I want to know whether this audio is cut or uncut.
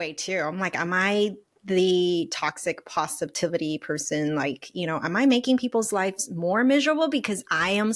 uncut